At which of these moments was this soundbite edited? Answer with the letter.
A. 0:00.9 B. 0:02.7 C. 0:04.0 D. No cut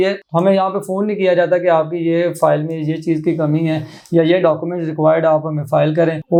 D